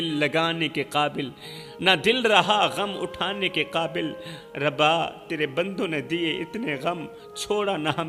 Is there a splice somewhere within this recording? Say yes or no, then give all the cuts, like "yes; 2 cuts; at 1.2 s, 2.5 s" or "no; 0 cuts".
no; 0 cuts